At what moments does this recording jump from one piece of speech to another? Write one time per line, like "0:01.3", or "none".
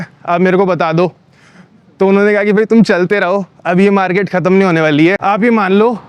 0:05.2